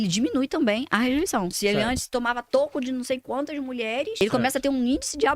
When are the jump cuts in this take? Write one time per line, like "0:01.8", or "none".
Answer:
0:01.5
0:04.2